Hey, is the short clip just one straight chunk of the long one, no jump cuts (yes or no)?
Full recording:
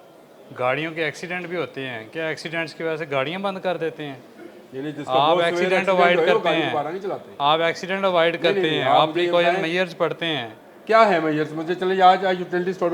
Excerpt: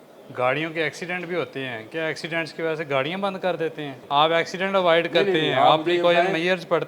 no